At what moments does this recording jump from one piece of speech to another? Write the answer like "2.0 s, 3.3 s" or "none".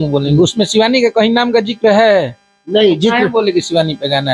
none